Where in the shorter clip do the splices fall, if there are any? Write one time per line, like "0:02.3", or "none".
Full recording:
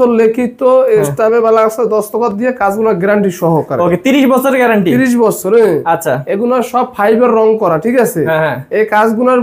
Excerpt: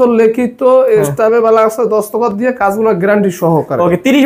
none